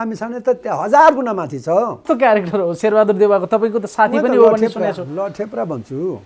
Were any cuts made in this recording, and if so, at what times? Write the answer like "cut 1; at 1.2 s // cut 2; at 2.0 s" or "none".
cut 1; at 2.0 s